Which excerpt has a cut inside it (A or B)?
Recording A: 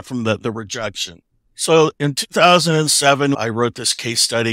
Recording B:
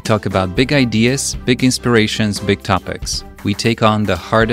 A